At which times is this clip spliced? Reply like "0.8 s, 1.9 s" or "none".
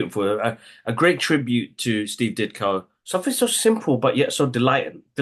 3.0 s